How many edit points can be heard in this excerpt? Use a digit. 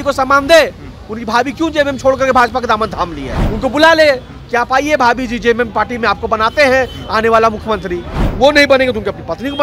2